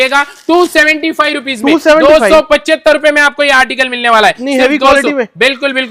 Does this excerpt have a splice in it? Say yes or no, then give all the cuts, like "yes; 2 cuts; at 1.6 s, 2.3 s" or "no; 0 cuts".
no; 0 cuts